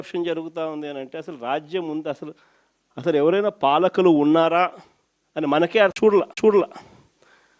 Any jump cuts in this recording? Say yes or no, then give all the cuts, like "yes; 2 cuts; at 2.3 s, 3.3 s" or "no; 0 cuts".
yes; 1 cut; at 6.1 s